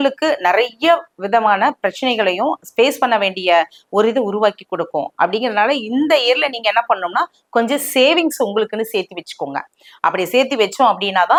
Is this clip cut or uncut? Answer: uncut